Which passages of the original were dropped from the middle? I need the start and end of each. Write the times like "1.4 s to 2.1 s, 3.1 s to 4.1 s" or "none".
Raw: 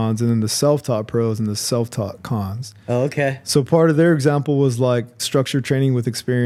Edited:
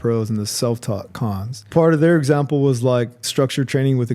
2.8 s to 3.7 s